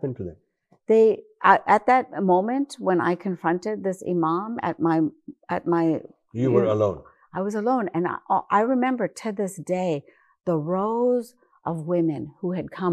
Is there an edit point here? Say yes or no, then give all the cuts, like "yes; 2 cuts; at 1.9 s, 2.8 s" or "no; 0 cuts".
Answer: no; 0 cuts